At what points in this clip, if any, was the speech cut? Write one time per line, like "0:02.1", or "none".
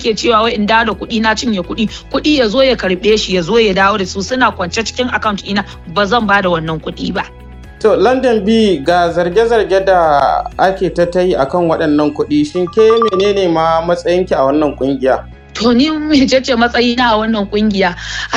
none